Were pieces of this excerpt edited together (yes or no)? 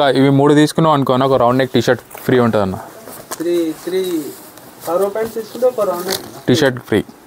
no